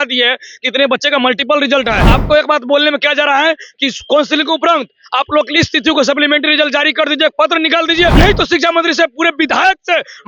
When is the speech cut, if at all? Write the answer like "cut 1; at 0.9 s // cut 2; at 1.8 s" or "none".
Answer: cut 1; at 2.1 s // cut 2; at 8.1 s

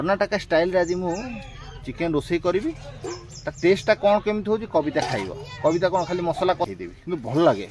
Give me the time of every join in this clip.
cut 1; at 6.7 s

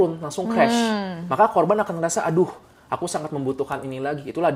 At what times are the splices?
none

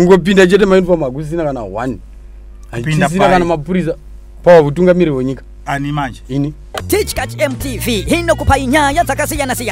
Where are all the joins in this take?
cut 1; at 6.7 s

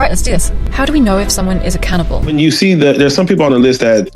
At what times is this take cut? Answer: cut 1; at 2.2 s

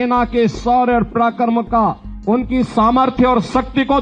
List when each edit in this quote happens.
cut 1; at 2.1 s

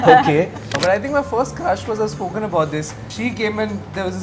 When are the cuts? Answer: cut 1; at 0.8 s // cut 2; at 3.1 s

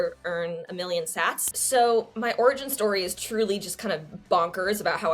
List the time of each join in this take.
cut 1; at 1.5 s

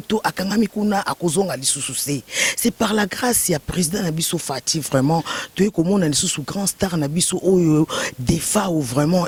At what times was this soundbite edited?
none

